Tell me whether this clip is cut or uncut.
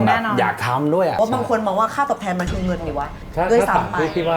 cut